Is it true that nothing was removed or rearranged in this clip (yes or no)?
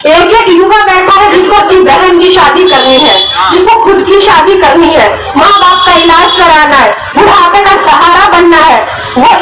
yes